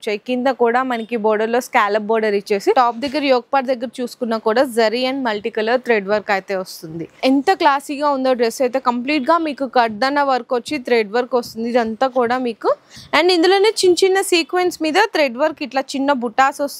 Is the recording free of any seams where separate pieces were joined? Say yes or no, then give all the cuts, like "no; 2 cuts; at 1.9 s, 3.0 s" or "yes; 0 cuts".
no; 3 cuts; at 2.7 s, 7.2 s, 12.9 s